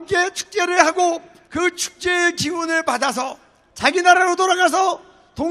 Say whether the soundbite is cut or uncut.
uncut